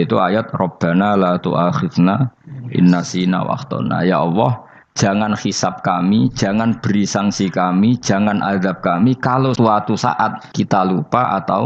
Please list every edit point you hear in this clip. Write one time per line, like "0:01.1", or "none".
0:09.6
0:10.4